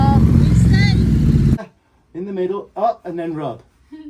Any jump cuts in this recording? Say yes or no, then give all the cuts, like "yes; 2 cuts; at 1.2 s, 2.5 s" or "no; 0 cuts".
yes; 1 cut; at 1.6 s